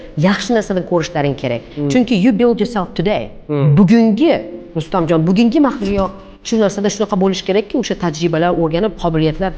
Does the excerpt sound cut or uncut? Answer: cut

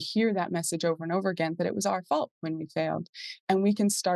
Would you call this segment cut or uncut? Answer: uncut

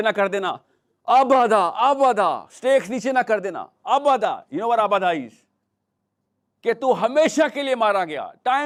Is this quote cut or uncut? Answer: uncut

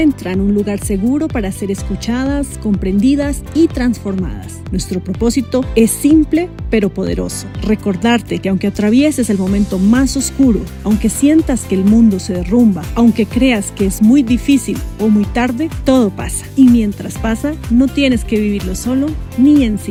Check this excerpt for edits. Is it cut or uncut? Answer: uncut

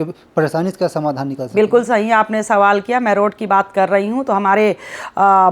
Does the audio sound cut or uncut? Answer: uncut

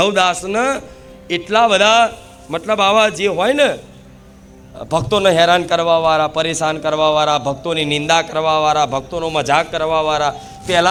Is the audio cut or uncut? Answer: uncut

